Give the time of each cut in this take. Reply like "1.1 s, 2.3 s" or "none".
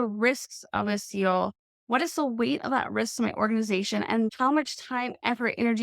4.3 s